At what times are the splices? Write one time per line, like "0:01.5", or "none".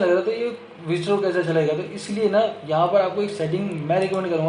none